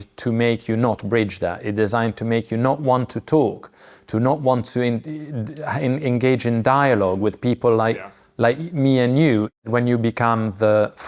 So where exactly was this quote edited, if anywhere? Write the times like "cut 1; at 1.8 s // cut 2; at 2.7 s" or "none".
cut 1; at 9.7 s

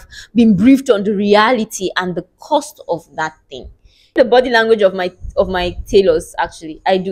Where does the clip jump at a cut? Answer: cut 1; at 4.1 s

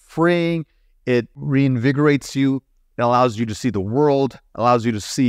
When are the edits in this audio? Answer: cut 1; at 1.4 s

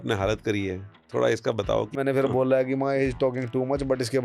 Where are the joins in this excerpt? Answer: cut 1; at 0.9 s // cut 2; at 1.9 s

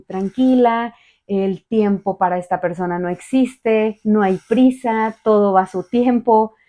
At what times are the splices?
none

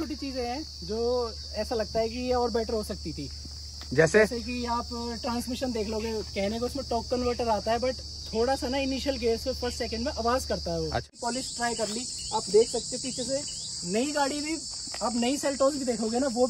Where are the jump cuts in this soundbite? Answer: cut 1; at 11.1 s

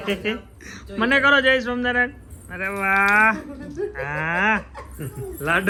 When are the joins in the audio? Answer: none

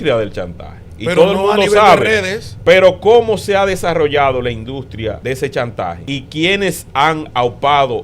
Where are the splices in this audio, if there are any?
cut 1; at 5.2 s // cut 2; at 6.0 s

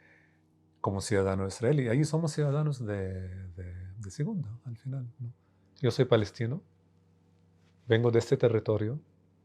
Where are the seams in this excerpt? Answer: cut 1; at 5.2 s

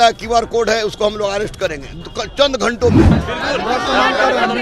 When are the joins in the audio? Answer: cut 1; at 3.2 s

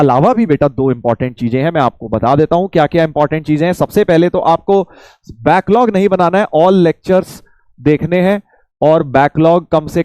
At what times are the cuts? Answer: none

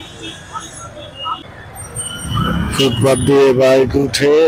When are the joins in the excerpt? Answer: cut 1; at 1.4 s

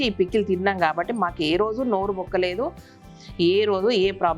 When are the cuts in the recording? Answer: none

